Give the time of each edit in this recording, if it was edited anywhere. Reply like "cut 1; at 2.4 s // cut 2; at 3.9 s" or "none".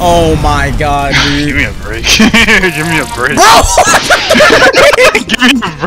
none